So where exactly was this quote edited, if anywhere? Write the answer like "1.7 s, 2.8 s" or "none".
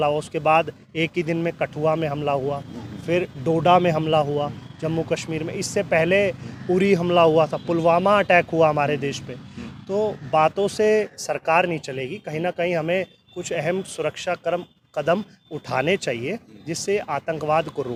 none